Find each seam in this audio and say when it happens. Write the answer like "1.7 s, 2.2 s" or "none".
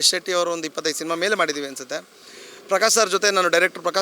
none